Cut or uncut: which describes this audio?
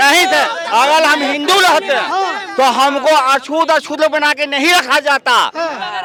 uncut